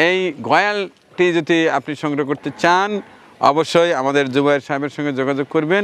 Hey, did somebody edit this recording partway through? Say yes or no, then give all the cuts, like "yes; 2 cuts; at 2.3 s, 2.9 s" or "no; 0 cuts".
no; 0 cuts